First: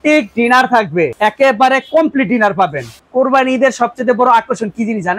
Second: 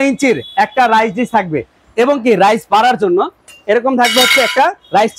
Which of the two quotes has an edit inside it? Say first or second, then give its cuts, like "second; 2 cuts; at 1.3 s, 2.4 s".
first; 2 cuts; at 1.1 s, 3.0 s